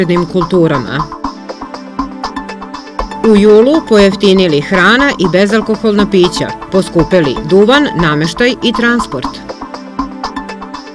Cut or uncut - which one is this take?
uncut